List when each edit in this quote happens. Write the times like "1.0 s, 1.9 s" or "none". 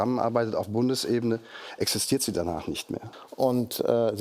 3.0 s